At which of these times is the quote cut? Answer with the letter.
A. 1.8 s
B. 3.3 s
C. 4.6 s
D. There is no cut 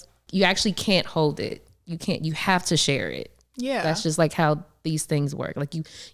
D